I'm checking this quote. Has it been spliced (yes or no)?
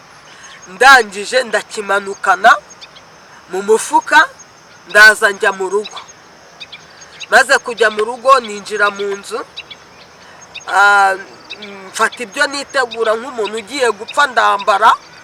no